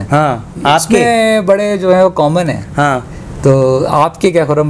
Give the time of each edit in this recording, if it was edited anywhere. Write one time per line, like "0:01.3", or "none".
none